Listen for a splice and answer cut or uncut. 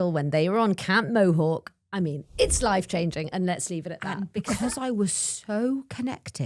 cut